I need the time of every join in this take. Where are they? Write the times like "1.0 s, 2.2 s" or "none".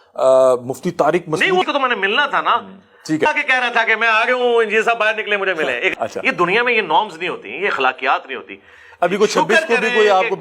1.6 s, 3.3 s, 5.9 s